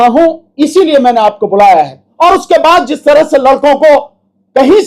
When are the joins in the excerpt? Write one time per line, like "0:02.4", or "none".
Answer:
0:02.1